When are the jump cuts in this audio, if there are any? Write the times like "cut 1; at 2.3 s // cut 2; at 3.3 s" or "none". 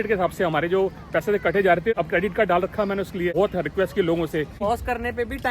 cut 1; at 1.9 s // cut 2; at 3.3 s // cut 3; at 4.6 s